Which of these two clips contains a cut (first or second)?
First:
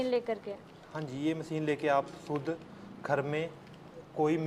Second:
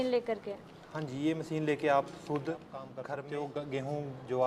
second